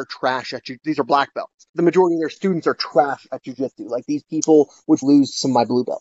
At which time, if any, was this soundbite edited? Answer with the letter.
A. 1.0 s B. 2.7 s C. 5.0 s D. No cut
C